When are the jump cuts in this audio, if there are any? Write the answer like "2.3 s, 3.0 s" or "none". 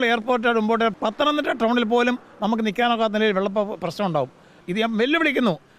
0.9 s, 4.6 s

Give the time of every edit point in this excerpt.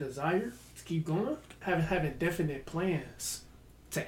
1.6 s

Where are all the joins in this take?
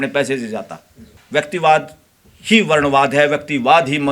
1.1 s

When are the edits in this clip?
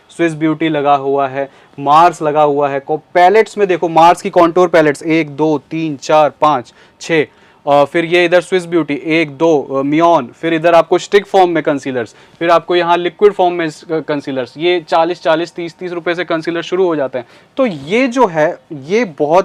none

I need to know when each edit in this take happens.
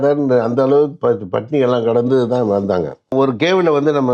3.1 s

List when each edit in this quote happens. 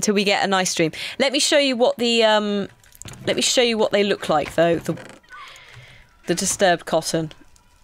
4.1 s

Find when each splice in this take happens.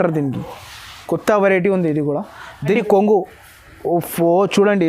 2.7 s

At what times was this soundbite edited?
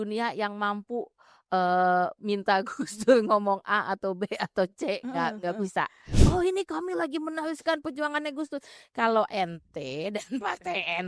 6.2 s

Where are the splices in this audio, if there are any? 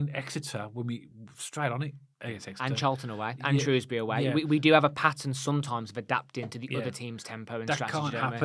none

